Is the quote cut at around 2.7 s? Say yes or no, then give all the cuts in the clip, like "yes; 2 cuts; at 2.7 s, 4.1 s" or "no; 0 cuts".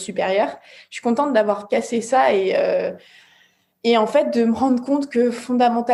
no; 0 cuts